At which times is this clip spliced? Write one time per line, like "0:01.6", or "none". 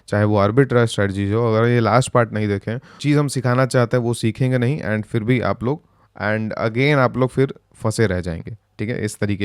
0:02.9